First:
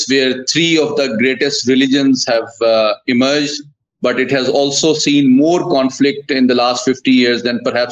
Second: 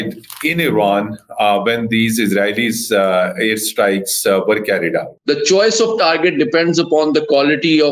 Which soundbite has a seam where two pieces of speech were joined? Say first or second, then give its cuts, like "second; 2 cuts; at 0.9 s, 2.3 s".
second; 1 cut; at 5.1 s